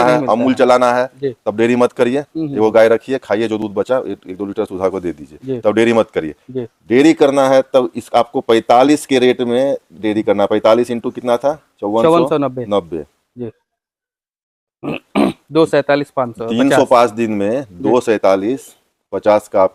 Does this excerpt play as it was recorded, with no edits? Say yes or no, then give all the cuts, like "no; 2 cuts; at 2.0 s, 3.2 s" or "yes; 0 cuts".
yes; 0 cuts